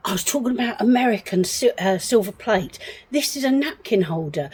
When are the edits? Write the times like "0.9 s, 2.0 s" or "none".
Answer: none